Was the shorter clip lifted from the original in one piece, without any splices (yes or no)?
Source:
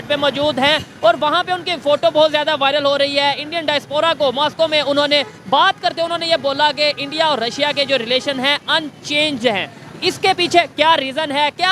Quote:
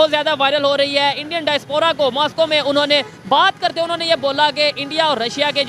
yes